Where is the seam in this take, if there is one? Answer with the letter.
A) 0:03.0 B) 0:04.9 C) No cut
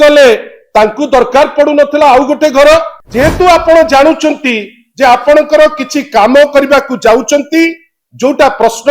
A